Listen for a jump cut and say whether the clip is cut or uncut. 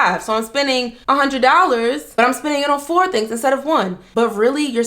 cut